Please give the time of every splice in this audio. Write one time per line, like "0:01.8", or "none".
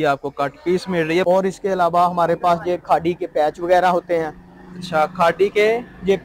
0:01.2